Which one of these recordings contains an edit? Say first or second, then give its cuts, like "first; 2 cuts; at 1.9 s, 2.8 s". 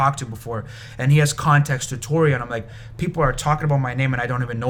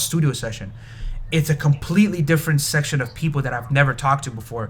second; 1 cut; at 2.7 s